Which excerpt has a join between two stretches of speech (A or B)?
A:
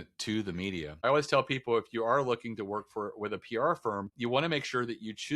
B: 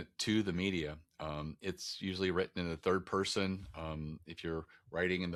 A